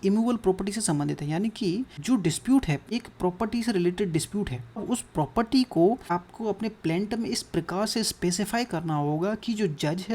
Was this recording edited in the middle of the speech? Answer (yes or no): yes